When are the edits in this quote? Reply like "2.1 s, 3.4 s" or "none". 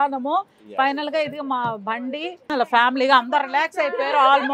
2.5 s